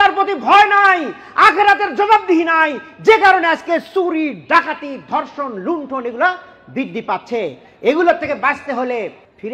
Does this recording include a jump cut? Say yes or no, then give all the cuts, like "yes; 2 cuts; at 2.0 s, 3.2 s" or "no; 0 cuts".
no; 0 cuts